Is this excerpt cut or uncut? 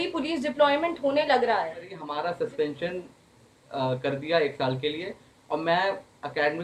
cut